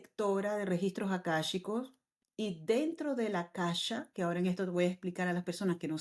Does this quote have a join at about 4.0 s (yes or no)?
no